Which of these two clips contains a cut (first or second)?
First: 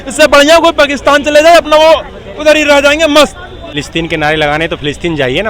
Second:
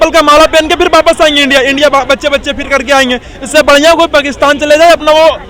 first